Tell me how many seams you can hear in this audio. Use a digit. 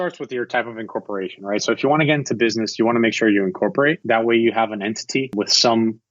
2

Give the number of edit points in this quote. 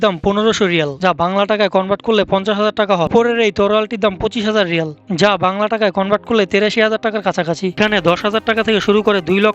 2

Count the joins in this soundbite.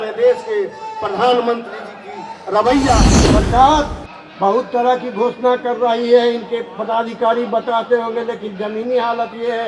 1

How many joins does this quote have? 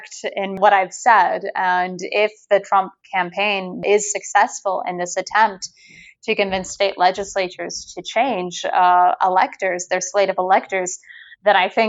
0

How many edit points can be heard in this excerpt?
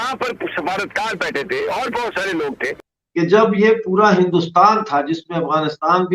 1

